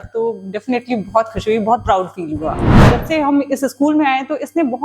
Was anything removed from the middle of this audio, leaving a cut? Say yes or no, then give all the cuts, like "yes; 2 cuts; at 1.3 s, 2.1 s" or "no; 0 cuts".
yes; 1 cut; at 2.8 s